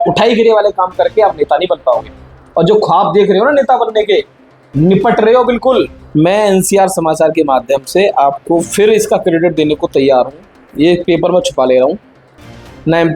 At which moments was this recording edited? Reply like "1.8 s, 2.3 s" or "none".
6.0 s